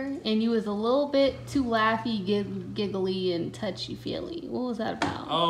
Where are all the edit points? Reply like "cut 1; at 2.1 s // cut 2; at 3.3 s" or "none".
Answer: none